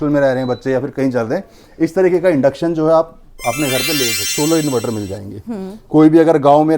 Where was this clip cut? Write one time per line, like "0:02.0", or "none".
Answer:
0:04.3